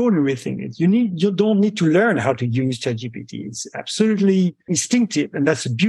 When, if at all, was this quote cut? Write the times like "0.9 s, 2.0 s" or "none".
4.8 s